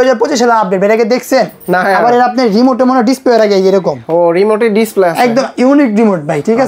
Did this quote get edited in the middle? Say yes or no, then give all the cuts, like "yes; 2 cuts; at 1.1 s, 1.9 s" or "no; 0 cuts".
no; 0 cuts